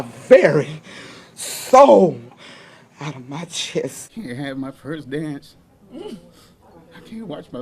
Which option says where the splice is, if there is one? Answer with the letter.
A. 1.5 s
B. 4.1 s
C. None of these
B